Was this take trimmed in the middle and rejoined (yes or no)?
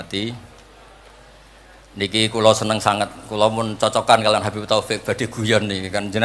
no